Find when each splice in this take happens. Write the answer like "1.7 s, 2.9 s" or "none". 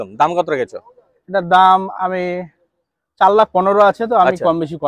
none